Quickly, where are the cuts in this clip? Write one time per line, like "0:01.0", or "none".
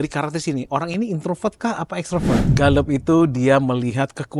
0:02.4